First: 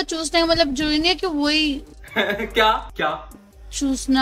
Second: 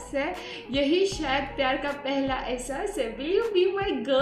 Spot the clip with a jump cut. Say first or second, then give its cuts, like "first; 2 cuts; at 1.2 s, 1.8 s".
first; 1 cut; at 2.9 s